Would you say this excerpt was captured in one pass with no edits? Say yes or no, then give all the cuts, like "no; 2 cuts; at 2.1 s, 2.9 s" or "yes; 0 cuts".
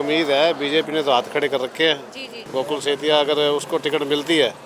no; 1 cut; at 2.4 s